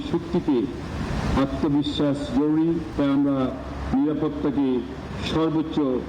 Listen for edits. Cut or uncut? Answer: cut